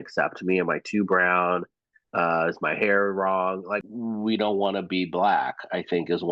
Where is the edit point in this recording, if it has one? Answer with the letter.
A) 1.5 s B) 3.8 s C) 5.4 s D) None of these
B